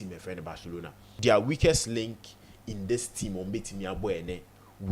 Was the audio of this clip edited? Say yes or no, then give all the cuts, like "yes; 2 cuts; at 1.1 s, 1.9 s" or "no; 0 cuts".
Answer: yes; 1 cut; at 1.1 s